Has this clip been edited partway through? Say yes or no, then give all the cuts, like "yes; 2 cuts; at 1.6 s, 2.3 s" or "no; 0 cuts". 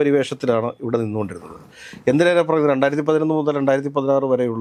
no; 0 cuts